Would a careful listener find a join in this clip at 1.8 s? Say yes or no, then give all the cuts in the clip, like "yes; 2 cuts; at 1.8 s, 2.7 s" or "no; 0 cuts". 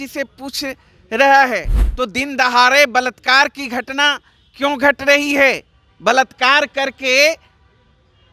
yes; 1 cut; at 1.8 s